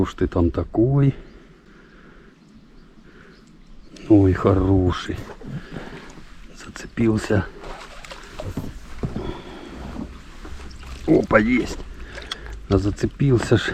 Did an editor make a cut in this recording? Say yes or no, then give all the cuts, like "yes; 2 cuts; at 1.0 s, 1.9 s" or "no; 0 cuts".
yes; 1 cut; at 1.6 s